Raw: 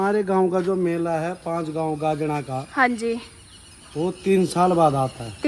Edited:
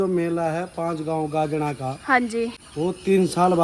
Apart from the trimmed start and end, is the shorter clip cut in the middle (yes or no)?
yes